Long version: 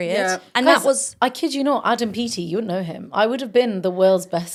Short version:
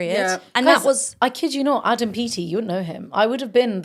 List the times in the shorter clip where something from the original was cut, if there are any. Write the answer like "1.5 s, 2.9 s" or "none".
none